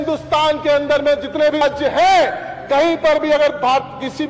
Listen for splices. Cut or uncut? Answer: cut